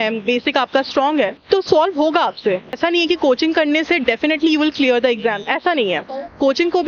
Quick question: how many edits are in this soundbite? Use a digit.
2